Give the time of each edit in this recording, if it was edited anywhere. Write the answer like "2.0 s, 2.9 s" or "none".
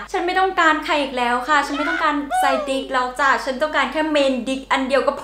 none